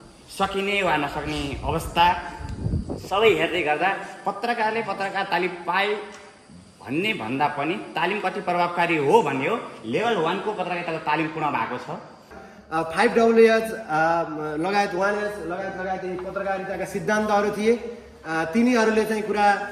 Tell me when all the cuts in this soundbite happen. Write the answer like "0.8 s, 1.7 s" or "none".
12.4 s